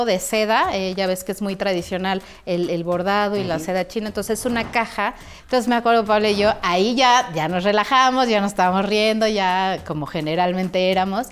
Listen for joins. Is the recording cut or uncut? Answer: cut